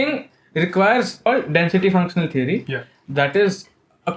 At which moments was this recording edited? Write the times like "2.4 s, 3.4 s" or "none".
1.3 s